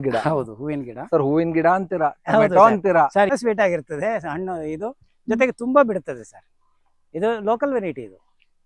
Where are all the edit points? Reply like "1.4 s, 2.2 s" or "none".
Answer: 3.3 s